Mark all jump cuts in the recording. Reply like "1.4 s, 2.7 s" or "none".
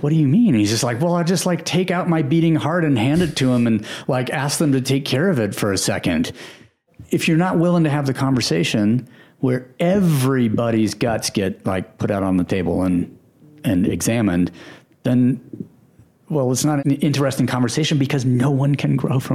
6.8 s, 16.8 s